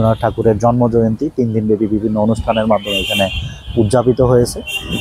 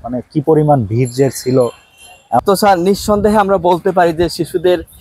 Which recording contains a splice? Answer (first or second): second